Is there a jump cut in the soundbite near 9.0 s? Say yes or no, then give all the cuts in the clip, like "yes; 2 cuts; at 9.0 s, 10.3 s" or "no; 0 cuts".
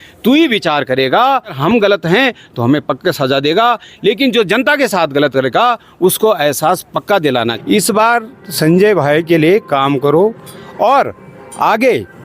no; 2 cuts; at 1.6 s, 7.5 s